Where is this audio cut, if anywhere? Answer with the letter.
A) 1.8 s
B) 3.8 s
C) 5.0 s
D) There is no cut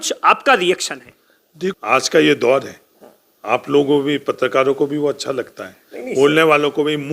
A